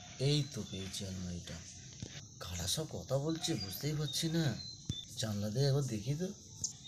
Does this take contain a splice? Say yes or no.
no